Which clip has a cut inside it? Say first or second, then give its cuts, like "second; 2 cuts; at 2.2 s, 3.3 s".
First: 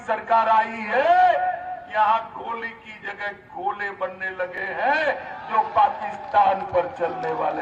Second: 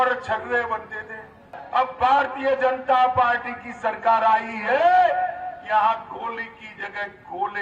second; 1 cut; at 1.6 s